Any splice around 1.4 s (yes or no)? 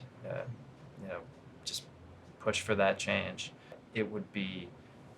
no